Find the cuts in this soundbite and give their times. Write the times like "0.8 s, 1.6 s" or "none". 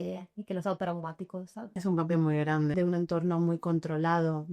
1.7 s, 2.7 s